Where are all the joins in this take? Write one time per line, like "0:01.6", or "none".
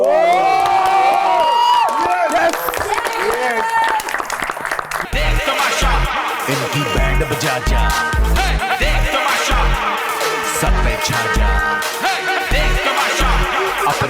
0:05.0